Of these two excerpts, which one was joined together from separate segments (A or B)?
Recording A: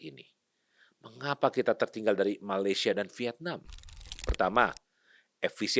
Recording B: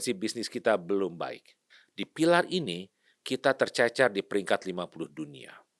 A